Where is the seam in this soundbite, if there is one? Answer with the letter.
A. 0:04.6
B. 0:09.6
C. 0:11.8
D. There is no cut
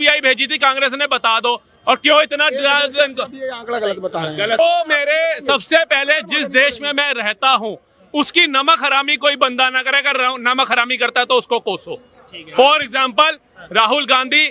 A